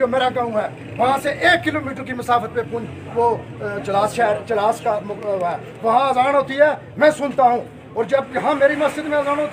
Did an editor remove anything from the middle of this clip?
no; 0 cuts

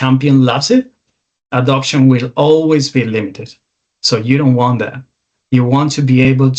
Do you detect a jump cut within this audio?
no; 0 cuts

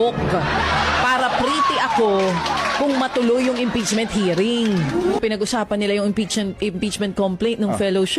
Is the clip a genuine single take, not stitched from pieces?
no; 1 cut; at 5.2 s

